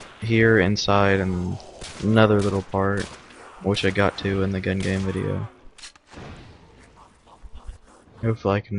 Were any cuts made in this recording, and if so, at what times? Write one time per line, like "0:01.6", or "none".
0:05.1